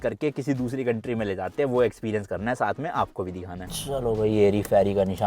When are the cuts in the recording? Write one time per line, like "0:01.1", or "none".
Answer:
0:03.6